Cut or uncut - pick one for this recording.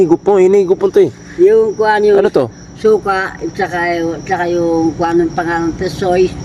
uncut